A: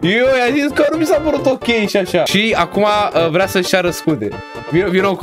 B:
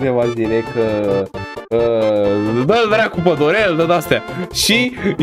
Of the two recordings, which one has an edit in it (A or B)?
A